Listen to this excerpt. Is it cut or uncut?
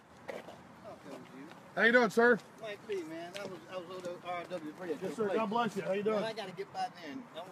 cut